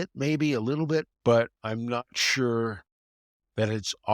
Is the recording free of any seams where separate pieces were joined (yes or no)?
no